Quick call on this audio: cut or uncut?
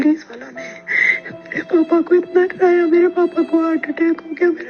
uncut